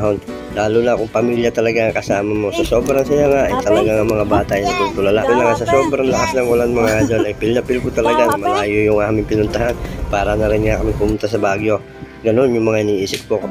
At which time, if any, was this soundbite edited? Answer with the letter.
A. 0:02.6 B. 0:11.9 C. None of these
C